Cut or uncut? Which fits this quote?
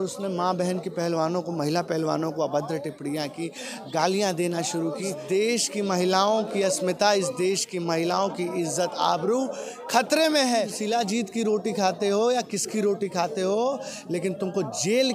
cut